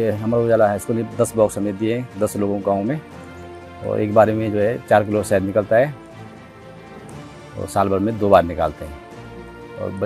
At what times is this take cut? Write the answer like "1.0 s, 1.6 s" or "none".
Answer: none